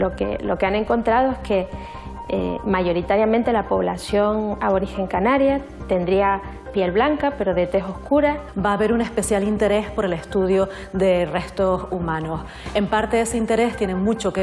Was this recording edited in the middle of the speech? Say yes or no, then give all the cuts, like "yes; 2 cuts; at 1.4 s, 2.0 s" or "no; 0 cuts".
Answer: yes; 1 cut; at 8.5 s